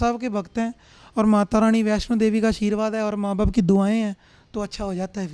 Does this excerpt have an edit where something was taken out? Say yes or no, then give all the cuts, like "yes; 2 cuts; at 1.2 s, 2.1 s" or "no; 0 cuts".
no; 0 cuts